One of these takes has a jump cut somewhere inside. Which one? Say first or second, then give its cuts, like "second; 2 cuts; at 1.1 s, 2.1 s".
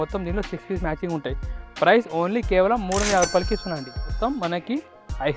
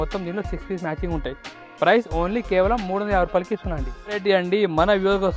first; 1 cut; at 4.0 s